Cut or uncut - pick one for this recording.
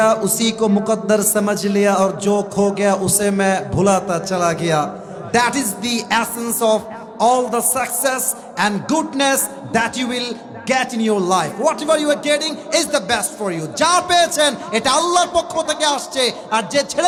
uncut